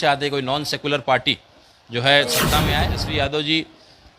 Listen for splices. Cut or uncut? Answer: cut